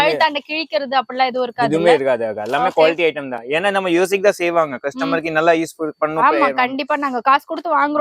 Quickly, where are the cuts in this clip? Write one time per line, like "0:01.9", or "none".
none